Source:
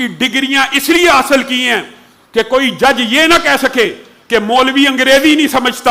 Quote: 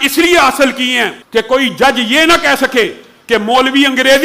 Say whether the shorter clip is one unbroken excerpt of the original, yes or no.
no